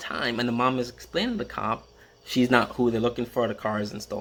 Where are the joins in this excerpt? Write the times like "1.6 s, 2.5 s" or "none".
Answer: none